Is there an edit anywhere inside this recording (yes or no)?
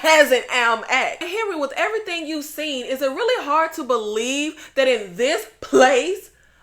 yes